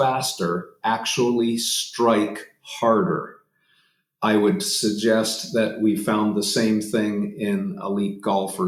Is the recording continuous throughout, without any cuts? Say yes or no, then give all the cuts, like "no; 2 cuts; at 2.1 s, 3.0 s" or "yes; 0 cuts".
yes; 0 cuts